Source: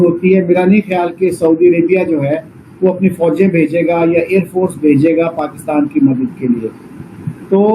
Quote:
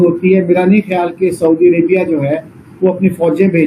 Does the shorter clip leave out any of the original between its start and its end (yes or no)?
no